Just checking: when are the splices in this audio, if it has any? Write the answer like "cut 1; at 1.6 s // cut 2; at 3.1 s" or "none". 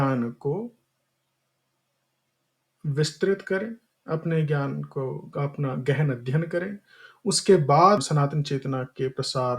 cut 1; at 8.0 s